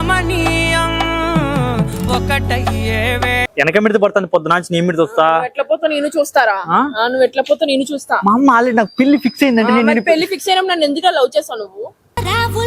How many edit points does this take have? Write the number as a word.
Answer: one